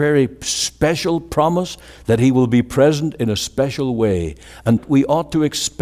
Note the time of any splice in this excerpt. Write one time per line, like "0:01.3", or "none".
0:04.8